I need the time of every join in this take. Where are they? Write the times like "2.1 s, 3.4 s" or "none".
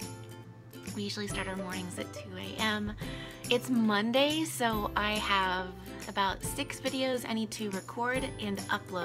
none